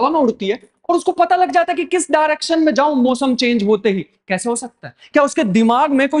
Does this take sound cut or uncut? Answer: uncut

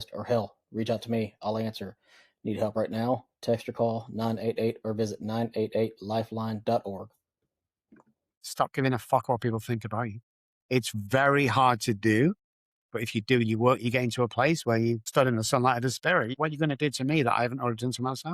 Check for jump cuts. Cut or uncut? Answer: cut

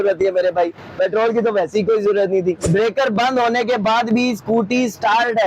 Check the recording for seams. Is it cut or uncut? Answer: cut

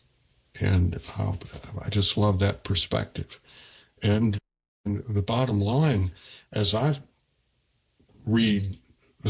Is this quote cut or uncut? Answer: uncut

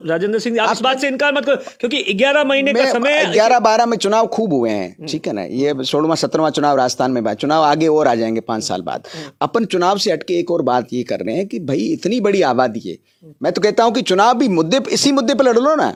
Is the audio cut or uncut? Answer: uncut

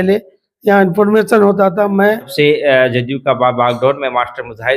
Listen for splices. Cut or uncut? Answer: cut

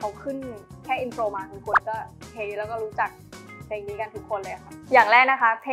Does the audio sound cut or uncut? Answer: uncut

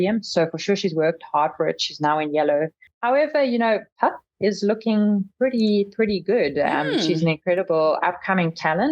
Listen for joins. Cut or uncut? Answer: cut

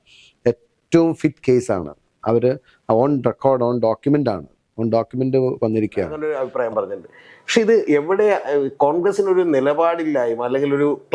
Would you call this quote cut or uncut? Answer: cut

